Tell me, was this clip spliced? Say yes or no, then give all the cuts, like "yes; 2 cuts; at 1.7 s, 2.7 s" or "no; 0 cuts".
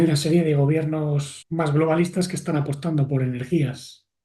yes; 1 cut; at 1.4 s